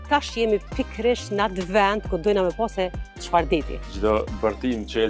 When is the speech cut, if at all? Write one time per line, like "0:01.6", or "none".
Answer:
0:03.9